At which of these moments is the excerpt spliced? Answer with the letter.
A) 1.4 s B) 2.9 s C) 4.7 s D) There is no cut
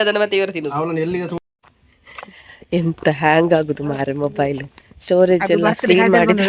A